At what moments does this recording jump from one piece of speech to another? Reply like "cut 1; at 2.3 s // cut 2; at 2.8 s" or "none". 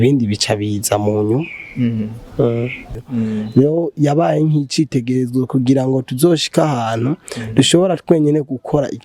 cut 1; at 3.0 s